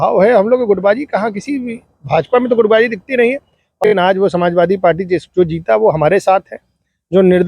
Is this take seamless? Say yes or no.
no